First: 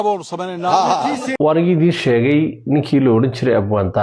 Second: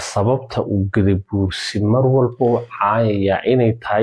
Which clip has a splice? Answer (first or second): first